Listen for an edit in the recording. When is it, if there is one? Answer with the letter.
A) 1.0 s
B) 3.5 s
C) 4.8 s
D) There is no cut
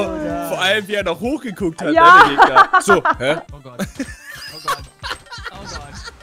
B